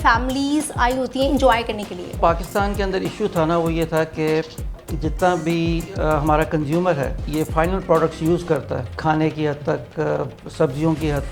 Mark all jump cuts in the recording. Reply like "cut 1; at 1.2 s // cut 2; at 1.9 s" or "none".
cut 1; at 2.2 s // cut 2; at 7.2 s // cut 3; at 8.9 s